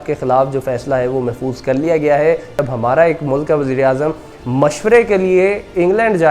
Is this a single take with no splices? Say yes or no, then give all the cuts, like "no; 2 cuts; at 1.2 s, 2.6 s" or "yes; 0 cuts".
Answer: no; 1 cut; at 2.6 s